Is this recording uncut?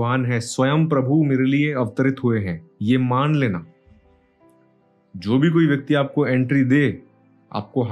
yes; 0 cuts

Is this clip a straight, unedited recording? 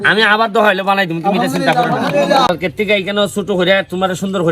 no; 1 cut; at 2.5 s

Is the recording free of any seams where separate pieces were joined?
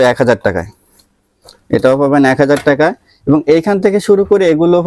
yes; 0 cuts

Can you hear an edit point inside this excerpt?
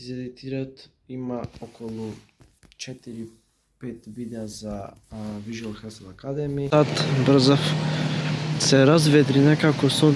yes; 1 cut; at 6.7 s

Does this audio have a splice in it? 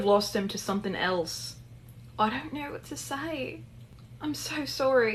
no; 0 cuts

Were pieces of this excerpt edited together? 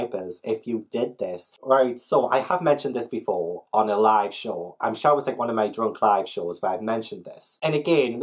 no; 0 cuts

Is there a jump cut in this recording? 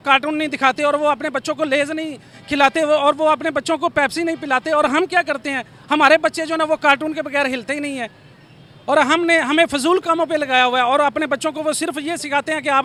no; 0 cuts

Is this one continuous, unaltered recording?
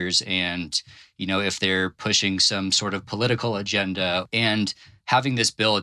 no; 1 cut; at 4.3 s

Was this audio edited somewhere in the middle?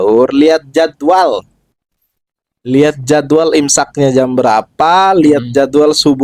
no; 0 cuts

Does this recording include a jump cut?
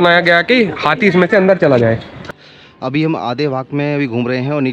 yes; 1 cut; at 2.3 s

